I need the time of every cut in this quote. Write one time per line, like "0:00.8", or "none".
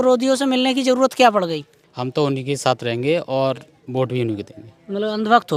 none